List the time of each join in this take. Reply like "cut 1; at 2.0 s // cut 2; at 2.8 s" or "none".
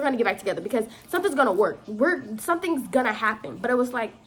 none